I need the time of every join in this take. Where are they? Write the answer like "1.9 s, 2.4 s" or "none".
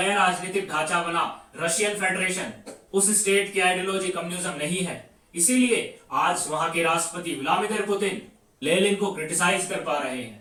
none